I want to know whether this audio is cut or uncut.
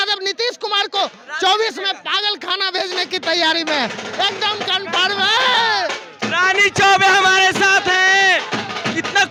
uncut